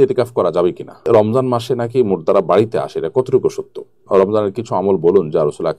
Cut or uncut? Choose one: cut